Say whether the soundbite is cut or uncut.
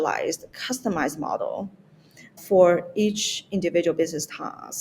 cut